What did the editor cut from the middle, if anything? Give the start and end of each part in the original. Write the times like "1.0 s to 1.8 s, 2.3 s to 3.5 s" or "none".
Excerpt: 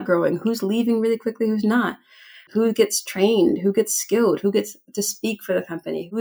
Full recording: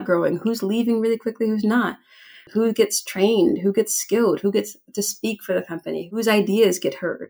none

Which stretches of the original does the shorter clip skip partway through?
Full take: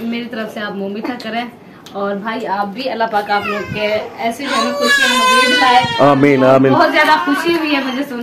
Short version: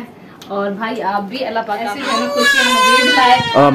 3.3 s to 4.3 s

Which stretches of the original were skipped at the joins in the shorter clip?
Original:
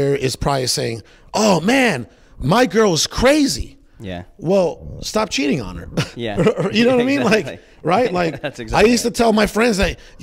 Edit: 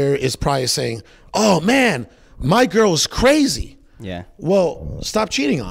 none

